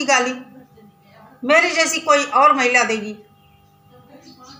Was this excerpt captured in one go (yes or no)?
yes